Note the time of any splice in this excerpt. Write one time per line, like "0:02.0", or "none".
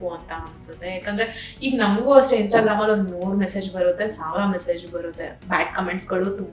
none